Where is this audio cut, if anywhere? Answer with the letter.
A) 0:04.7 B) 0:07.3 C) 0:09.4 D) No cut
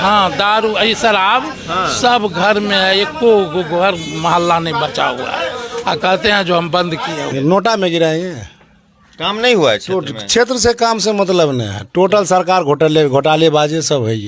B